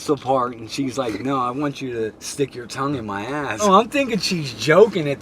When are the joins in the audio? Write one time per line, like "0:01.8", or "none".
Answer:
0:02.2
0:03.6